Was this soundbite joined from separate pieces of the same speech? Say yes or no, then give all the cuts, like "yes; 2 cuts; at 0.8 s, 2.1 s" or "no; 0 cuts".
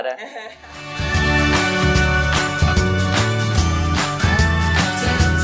no; 0 cuts